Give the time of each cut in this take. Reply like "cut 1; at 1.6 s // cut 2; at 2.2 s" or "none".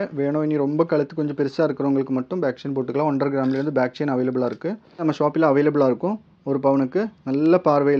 cut 1; at 5.0 s